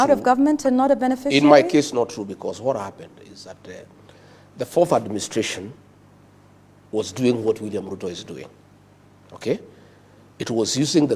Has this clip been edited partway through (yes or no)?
no